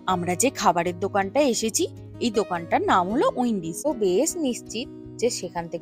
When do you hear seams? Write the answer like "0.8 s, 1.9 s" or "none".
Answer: 3.9 s